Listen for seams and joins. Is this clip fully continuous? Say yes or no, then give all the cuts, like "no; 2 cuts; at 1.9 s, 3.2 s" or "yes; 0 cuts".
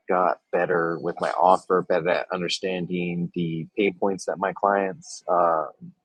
yes; 0 cuts